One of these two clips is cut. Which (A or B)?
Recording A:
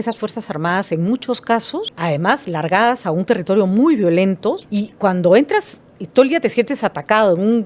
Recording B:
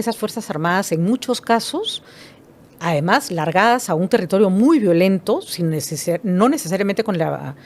A